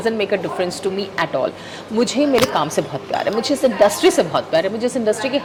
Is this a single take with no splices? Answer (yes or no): yes